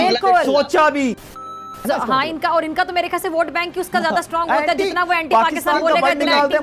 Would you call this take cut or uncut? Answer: cut